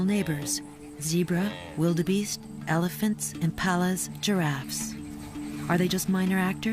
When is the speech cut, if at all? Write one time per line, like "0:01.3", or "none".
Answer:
0:01.5